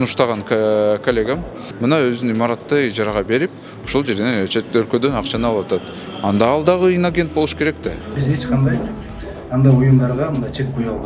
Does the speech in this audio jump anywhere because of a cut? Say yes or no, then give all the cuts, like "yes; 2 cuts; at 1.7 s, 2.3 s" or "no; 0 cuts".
yes; 2 cuts; at 1.6 s, 8.1 s